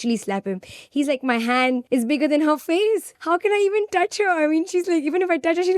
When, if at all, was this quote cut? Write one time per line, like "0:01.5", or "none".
0:01.8
0:03.1